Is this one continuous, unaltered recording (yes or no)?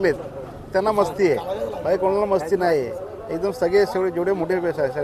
yes